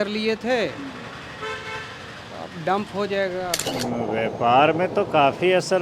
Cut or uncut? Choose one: cut